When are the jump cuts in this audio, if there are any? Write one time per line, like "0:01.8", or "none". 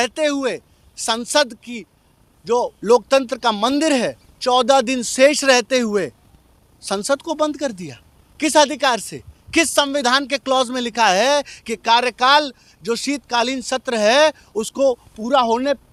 none